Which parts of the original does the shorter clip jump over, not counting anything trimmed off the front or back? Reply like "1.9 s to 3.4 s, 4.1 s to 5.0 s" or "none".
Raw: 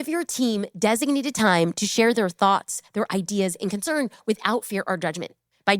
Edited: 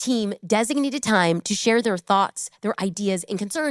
none